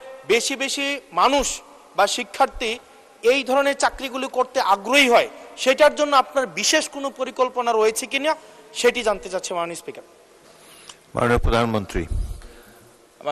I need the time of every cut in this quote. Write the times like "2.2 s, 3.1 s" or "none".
none